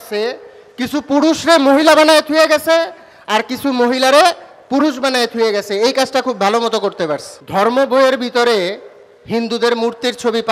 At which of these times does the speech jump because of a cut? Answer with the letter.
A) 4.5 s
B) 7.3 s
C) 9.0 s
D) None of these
B